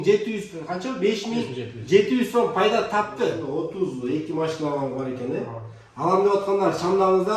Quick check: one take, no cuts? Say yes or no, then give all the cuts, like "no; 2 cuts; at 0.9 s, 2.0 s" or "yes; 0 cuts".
no; 1 cut; at 3.4 s